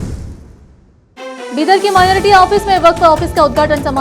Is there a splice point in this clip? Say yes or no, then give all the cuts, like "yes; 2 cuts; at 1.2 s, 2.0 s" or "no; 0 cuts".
yes; 1 cut; at 1.0 s